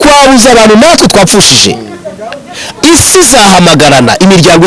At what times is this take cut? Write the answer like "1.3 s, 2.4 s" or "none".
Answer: none